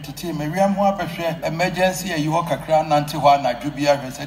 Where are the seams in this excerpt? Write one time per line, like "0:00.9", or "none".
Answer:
0:01.4